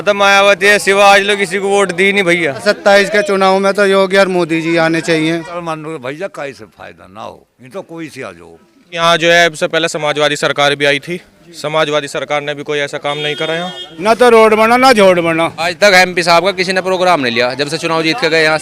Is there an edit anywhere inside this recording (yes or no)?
yes